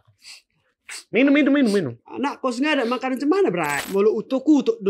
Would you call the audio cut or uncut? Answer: cut